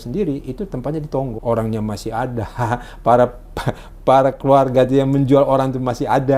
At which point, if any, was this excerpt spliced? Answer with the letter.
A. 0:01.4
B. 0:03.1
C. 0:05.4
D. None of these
A